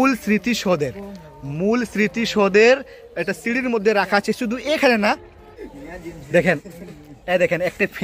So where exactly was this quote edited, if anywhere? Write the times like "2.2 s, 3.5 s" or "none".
5.4 s